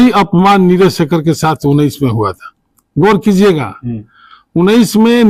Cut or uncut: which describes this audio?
uncut